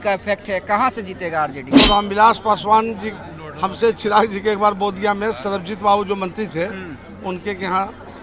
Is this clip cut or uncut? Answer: cut